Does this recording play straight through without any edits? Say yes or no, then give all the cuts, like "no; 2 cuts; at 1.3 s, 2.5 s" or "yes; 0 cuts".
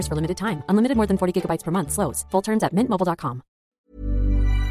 no; 1 cut; at 3.8 s